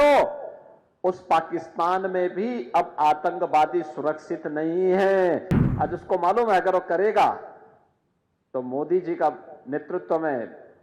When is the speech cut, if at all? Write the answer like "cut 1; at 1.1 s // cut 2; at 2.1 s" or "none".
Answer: cut 1; at 5.5 s